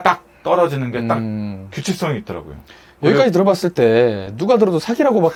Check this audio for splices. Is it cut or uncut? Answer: uncut